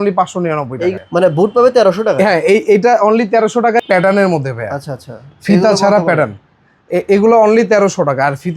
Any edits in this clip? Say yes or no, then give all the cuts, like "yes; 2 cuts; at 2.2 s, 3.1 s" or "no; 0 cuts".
yes; 2 cuts; at 1.0 s, 3.8 s